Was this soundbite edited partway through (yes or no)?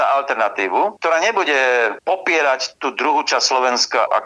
yes